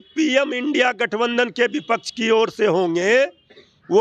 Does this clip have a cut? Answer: no; 0 cuts

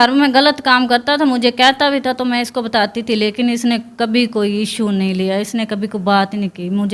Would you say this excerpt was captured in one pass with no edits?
yes; 0 cuts

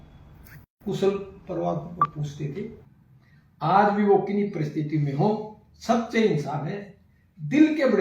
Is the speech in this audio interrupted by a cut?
yes; 1 cut; at 2.8 s

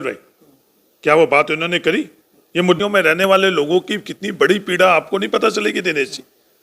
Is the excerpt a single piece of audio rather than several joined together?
no; 1 cut; at 2.8 s

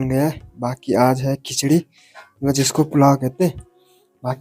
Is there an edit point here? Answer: no; 0 cuts

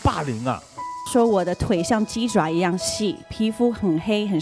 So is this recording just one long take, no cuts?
no; 1 cut; at 1.1 s

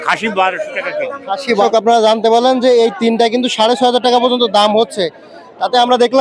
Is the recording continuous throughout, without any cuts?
no; 1 cut; at 1.6 s

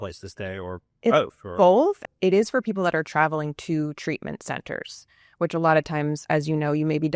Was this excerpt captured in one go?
no; 1 cut; at 2.0 s

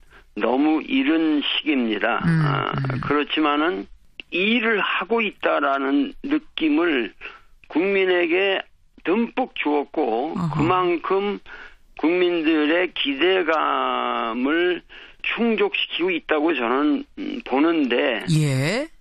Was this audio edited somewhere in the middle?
yes; 1 cut; at 14.4 s

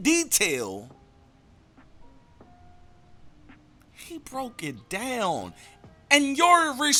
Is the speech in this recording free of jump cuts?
yes; 0 cuts

